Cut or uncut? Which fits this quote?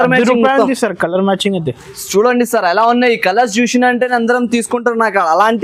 uncut